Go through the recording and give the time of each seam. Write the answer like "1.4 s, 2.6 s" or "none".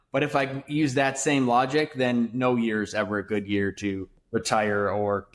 4.1 s